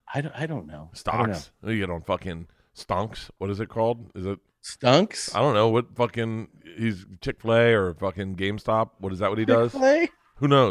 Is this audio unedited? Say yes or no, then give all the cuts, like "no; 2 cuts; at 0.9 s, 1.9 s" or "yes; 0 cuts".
yes; 0 cuts